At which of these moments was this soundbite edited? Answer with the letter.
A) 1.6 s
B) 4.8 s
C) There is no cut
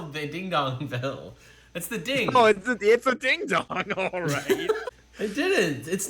B